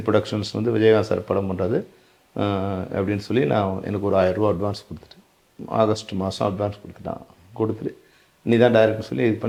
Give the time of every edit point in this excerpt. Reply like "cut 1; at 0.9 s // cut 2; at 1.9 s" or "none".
none